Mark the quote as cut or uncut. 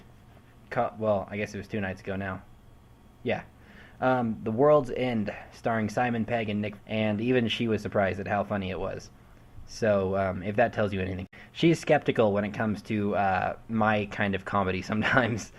uncut